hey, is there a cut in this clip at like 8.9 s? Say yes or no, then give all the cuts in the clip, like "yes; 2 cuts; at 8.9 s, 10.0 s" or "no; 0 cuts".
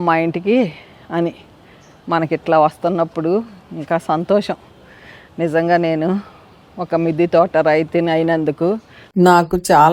yes; 1 cut; at 8.9 s